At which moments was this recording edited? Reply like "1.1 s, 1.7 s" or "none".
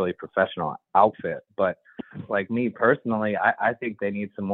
2.1 s